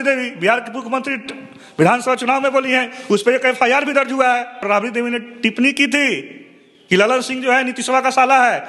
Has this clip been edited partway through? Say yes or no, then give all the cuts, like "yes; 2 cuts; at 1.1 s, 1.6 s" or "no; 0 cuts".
yes; 1 cut; at 4.6 s